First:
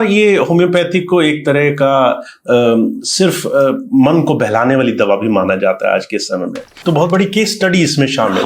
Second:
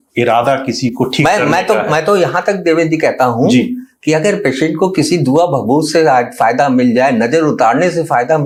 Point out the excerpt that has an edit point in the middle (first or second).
first